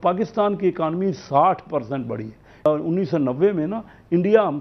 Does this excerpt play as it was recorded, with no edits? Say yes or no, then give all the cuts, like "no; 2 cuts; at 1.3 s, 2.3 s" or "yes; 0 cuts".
no; 1 cut; at 2.7 s